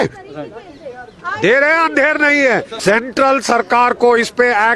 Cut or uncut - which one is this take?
cut